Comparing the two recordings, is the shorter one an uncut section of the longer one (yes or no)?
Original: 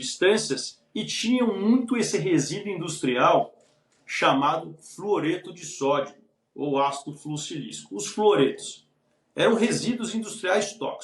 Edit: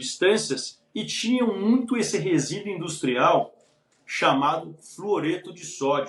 yes